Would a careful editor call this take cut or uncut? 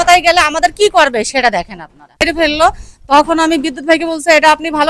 cut